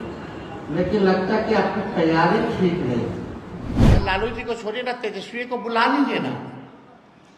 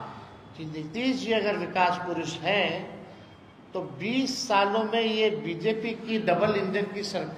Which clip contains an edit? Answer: first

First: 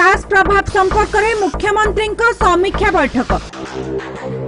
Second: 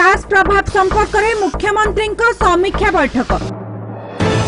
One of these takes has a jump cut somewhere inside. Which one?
second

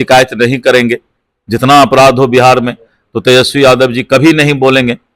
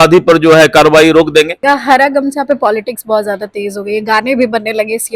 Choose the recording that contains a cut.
second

